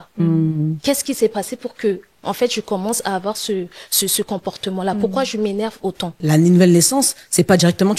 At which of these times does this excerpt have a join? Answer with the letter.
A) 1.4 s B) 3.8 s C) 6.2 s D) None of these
C